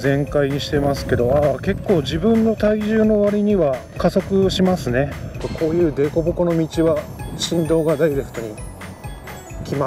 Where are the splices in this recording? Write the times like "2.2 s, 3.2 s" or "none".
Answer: 3.9 s, 5.4 s